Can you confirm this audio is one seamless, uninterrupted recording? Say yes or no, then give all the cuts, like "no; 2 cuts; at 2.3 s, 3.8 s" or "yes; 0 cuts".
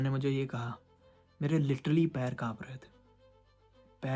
yes; 0 cuts